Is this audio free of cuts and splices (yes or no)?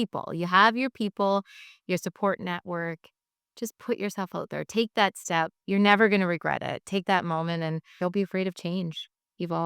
no